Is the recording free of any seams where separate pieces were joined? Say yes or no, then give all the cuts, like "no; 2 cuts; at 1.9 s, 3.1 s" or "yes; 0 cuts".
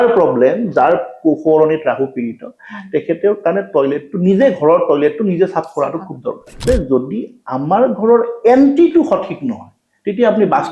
no; 1 cut; at 6.6 s